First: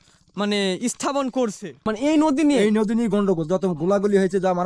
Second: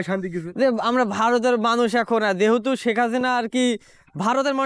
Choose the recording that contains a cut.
first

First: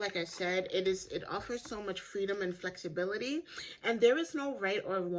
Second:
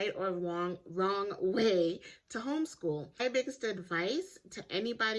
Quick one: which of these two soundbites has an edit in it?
second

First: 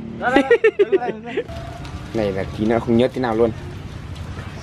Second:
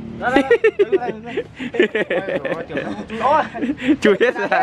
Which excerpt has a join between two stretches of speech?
first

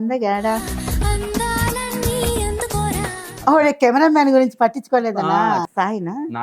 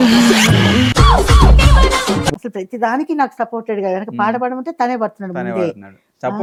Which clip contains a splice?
first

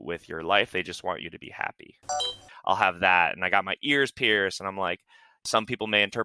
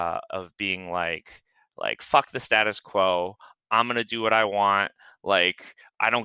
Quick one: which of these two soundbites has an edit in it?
first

